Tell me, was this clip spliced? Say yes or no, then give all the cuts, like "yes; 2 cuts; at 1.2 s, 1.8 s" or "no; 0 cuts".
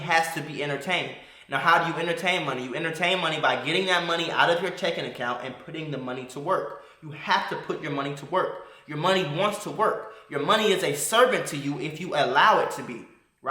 no; 0 cuts